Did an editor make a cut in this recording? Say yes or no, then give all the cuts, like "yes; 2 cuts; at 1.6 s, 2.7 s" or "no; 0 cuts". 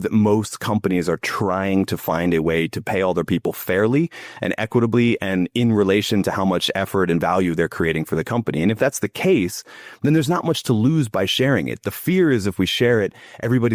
no; 0 cuts